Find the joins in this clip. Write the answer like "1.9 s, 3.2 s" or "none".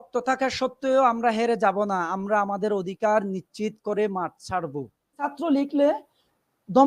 5.3 s